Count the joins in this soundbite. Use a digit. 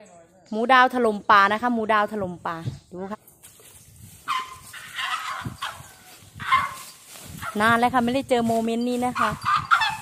1